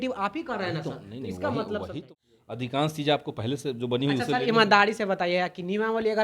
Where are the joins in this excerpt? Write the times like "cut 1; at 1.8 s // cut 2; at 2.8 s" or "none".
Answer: cut 1; at 2.0 s